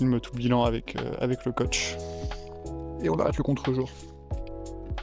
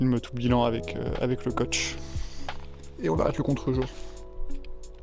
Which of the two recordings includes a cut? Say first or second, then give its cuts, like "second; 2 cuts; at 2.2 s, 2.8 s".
first; 3 cuts; at 1.7 s, 3.0 s, 4.1 s